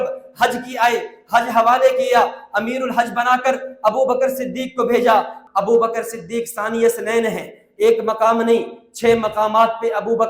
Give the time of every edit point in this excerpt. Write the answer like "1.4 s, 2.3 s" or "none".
5.4 s